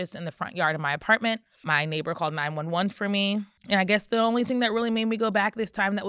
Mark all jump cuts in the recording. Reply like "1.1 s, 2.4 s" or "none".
1.6 s, 3.5 s